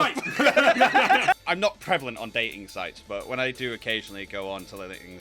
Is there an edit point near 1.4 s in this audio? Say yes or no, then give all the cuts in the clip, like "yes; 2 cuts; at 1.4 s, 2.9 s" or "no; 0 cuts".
yes; 1 cut; at 1.4 s